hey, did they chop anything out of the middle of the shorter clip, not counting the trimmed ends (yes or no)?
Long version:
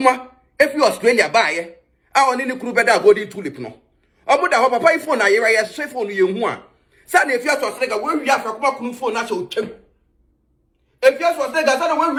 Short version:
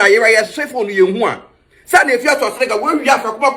no